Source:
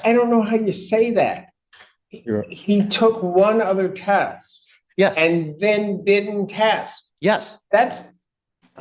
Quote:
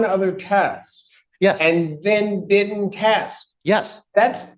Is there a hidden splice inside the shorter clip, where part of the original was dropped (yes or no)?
no